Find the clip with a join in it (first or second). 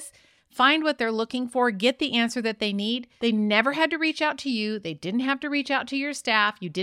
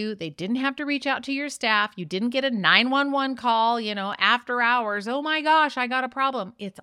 first